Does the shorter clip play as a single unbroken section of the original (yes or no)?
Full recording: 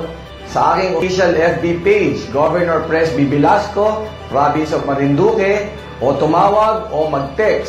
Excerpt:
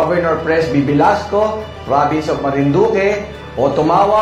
yes